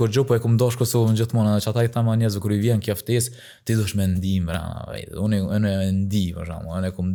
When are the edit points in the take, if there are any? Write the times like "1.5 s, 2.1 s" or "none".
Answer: none